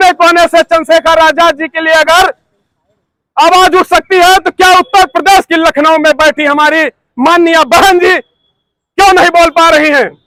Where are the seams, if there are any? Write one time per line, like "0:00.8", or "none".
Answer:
none